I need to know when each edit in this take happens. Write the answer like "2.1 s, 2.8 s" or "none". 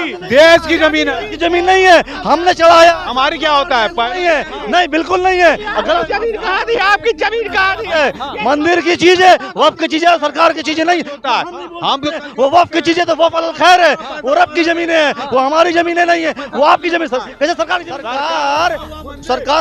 17.9 s